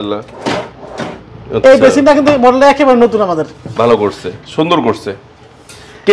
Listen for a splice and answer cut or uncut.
uncut